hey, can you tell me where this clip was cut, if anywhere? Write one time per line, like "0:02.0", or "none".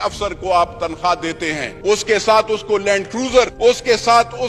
0:01.7
0:03.5